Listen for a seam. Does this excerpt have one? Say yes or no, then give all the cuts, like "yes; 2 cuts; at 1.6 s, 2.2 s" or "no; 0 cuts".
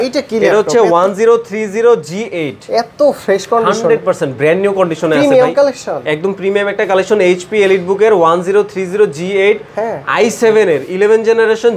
no; 0 cuts